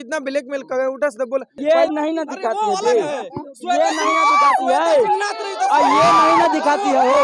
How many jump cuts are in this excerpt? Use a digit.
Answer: 1